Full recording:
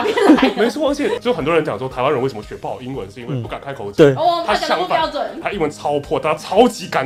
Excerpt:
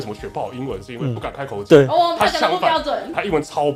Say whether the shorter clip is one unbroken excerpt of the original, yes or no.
yes